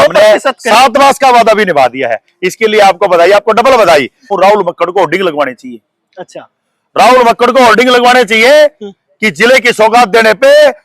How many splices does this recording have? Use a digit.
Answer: 1